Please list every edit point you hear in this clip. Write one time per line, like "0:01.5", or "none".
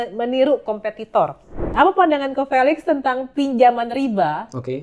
0:01.7